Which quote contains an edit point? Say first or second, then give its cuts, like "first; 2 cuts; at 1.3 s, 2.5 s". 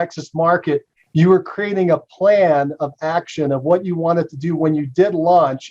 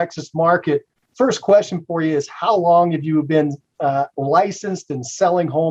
first; 1 cut; at 1.0 s